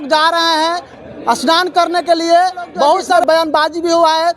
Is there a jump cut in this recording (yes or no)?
yes